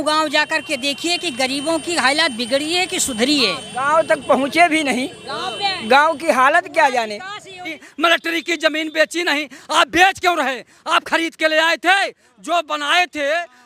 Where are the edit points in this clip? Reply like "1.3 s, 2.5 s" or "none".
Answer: 7.8 s